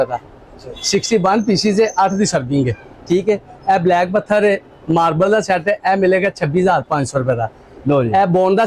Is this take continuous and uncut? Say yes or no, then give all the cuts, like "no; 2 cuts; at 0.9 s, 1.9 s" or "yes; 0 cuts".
yes; 0 cuts